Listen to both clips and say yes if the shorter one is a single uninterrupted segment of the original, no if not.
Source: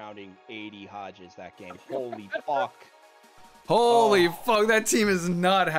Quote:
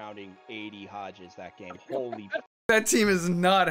no